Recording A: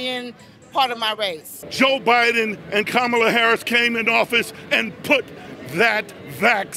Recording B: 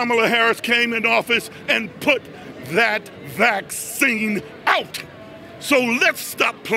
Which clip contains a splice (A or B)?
A